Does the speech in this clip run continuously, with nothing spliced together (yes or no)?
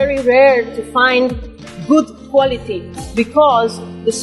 yes